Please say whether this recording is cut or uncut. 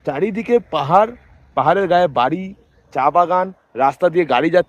uncut